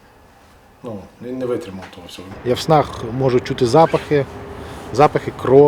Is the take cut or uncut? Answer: cut